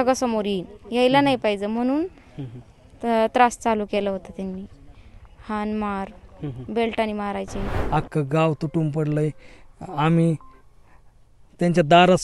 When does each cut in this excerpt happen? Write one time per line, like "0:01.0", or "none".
0:07.7